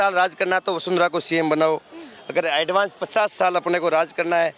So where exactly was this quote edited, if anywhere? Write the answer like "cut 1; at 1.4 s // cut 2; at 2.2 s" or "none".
none